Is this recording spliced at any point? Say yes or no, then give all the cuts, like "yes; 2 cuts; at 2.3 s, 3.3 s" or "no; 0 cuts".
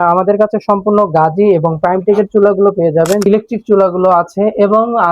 yes; 1 cut; at 3.2 s